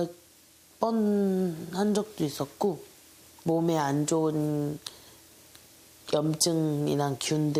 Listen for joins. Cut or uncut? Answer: uncut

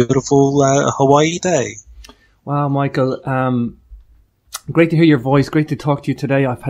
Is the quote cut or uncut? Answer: cut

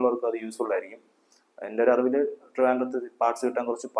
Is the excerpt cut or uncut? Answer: uncut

